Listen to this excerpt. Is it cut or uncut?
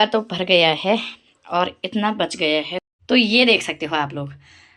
cut